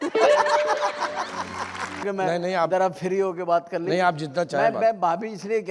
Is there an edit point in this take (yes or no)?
yes